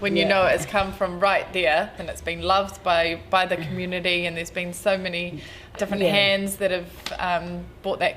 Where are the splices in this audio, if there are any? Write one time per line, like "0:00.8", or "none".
0:02.0
0:05.8